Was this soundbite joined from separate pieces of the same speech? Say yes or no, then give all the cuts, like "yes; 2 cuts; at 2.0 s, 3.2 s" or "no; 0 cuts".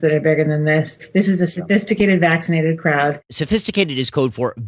yes; 2 cuts; at 1.0 s, 3.4 s